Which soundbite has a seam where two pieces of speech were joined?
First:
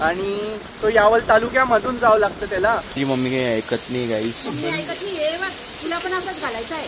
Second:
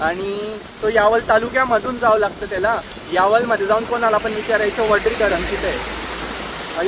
first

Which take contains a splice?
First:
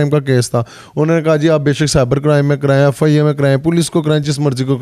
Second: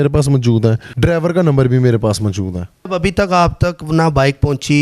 second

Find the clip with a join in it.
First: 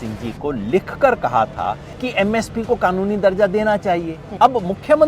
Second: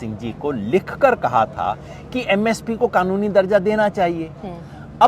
first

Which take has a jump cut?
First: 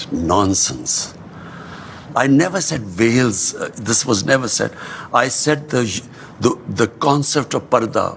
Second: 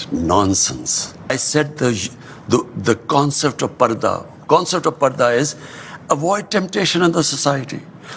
second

